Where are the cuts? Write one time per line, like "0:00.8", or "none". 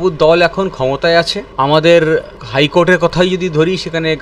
0:01.4
0:02.4